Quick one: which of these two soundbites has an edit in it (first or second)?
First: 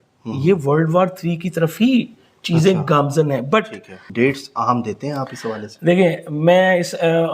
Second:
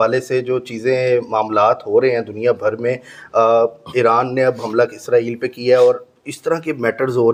first